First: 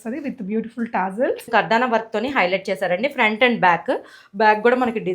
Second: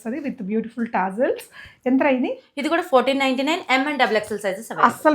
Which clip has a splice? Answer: first; 1 cut; at 1.5 s

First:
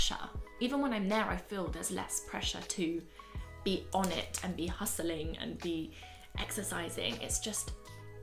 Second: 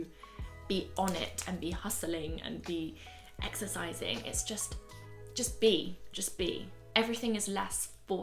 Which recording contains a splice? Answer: second; 1 cut; at 6.7 s

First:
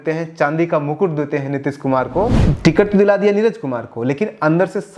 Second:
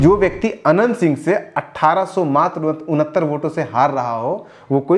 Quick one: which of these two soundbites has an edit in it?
first; 1 cut; at 2.4 s

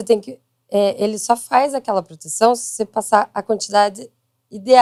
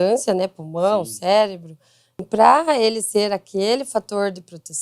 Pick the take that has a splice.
second; 1 cut; at 2.3 s

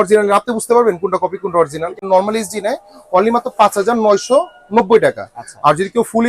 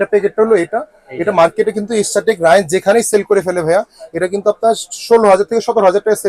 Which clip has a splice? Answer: first; 1 cut; at 2.1 s

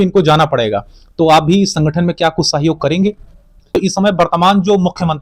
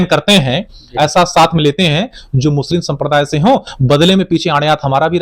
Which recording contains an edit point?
first; 1 cut; at 3.7 s

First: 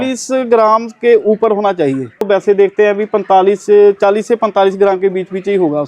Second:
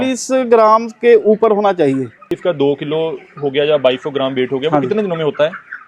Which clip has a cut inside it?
second; 1 cut; at 2.1 s

